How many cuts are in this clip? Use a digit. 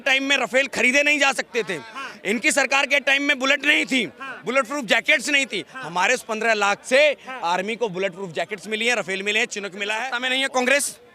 1